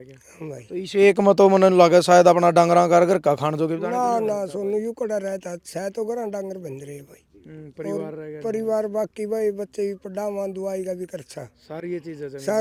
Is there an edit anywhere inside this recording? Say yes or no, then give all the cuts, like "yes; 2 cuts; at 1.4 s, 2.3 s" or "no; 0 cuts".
no; 0 cuts